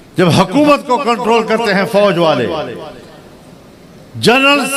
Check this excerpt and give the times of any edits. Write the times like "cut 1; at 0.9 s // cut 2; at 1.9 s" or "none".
none